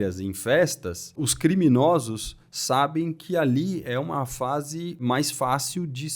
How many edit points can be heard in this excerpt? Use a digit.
2